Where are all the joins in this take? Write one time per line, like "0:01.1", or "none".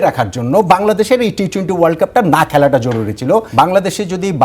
0:03.5